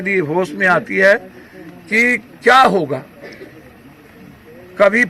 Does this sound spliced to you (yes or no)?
no